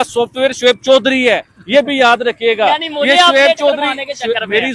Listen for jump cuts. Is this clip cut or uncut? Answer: uncut